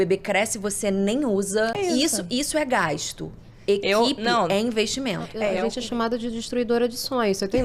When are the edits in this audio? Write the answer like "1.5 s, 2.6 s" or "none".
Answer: 1.8 s, 5.5 s